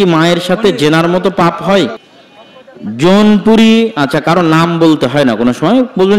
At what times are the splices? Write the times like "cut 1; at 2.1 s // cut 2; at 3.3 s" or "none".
cut 1; at 2.1 s